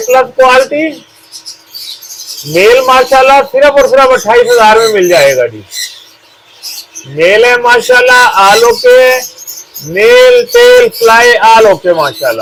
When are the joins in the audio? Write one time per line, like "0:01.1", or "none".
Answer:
none